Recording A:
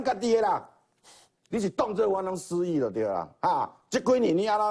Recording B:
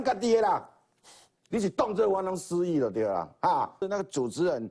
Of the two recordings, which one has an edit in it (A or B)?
B